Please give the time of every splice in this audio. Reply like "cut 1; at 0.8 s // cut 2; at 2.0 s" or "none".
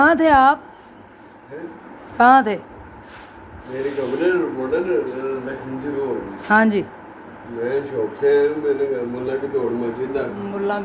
none